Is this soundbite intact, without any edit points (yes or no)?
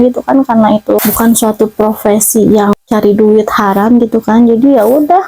no